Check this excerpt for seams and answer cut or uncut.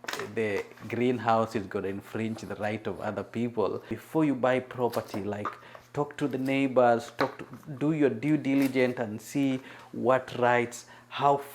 cut